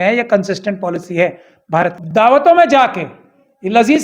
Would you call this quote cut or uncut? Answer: cut